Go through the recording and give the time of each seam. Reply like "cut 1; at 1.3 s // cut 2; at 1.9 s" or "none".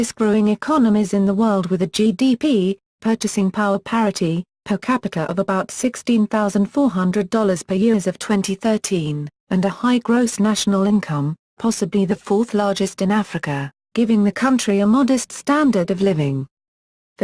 cut 1; at 8.7 s